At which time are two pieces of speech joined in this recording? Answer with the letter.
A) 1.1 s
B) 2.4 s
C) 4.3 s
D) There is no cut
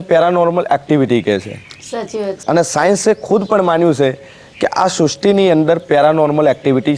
B